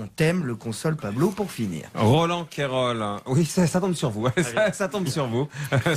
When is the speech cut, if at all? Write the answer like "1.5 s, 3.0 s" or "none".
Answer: 2.1 s